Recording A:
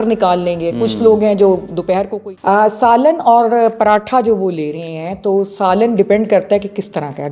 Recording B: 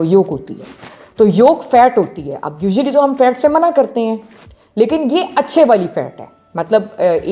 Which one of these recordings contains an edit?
A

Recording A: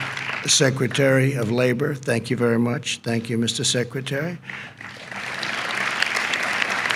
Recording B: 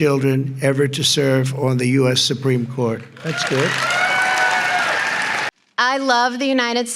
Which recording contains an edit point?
B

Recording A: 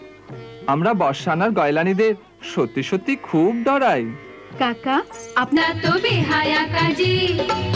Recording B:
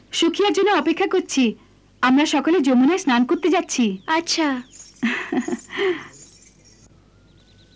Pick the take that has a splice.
A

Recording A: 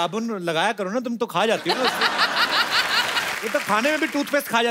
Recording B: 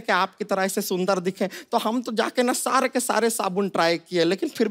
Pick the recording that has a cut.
A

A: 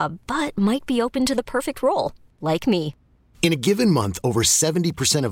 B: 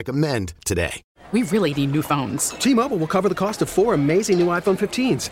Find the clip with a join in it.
B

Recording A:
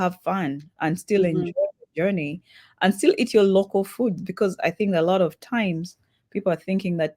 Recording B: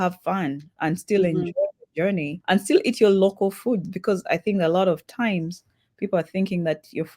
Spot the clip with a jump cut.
B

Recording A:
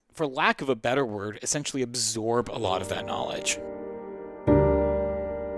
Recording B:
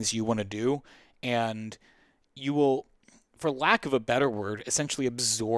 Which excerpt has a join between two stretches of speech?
A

